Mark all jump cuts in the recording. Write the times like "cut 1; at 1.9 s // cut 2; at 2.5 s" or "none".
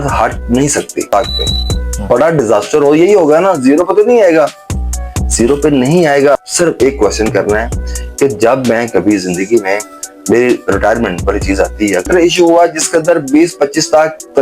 cut 1; at 1.1 s // cut 2; at 6.3 s // cut 3; at 12.1 s